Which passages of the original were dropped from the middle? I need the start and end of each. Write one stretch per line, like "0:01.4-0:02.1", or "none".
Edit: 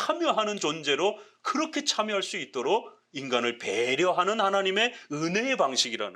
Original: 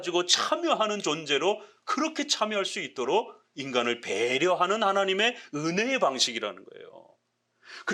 none